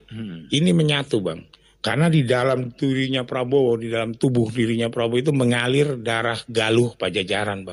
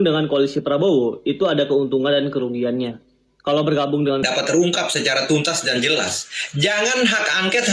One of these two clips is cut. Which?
second; 1 cut; at 4.1 s

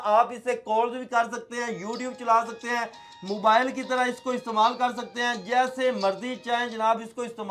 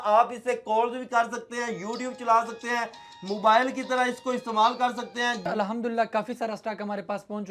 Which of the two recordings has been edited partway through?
second; 1 cut; at 5.4 s

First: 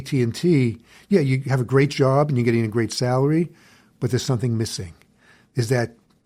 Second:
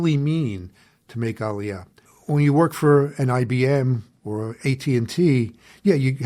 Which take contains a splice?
second; 1 cut; at 1.9 s

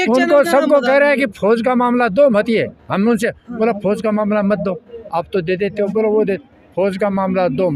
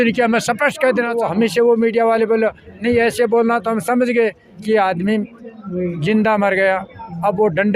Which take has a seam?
second; 1 cut; at 1.2 s

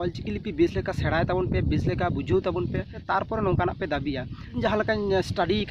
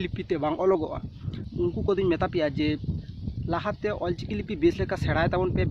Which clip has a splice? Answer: first; 2 cuts; at 3.0 s, 4.6 s

